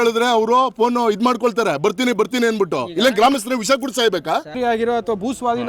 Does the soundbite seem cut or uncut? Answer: cut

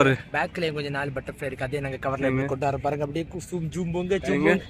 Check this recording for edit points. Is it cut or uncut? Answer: uncut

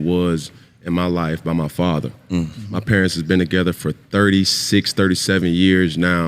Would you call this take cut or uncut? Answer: uncut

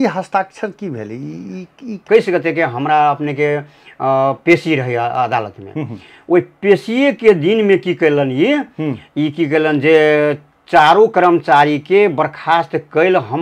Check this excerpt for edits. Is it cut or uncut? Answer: cut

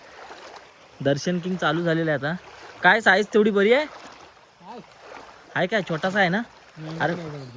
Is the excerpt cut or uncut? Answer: uncut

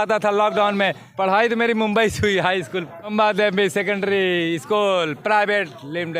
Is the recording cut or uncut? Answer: cut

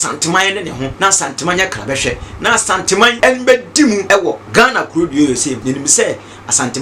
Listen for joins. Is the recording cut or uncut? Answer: cut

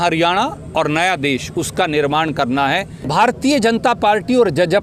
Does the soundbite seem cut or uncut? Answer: cut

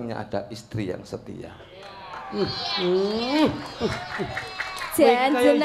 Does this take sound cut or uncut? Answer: uncut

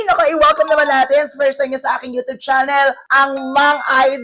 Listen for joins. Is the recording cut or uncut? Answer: cut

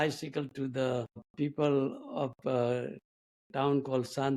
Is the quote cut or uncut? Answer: cut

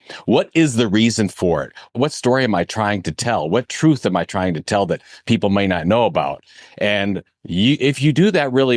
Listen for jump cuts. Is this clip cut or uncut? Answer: cut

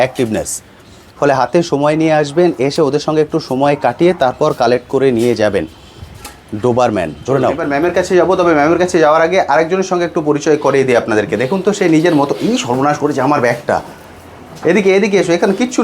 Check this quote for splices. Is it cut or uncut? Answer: cut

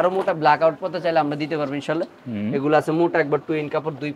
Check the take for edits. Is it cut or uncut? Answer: uncut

